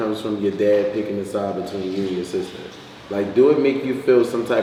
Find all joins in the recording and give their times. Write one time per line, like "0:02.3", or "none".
none